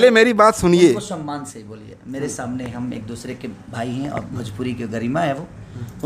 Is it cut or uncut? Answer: uncut